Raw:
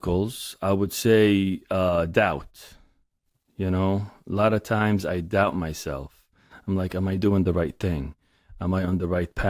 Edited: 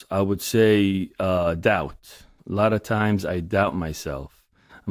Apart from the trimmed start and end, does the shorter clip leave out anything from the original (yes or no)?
yes